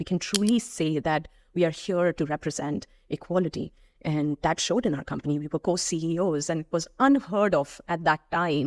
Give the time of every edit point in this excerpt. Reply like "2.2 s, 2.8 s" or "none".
none